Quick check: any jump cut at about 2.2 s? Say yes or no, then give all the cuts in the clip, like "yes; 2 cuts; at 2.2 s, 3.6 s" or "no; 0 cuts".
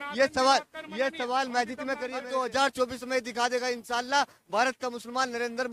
yes; 1 cut; at 2.2 s